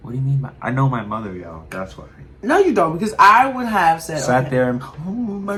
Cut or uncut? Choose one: uncut